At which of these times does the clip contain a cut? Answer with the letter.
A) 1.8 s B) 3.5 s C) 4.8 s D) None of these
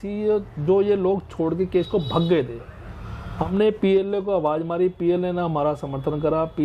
B